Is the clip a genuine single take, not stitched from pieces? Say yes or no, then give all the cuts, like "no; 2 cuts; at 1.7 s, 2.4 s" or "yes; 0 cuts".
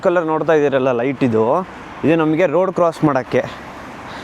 yes; 0 cuts